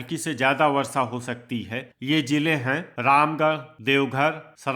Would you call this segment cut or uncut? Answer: cut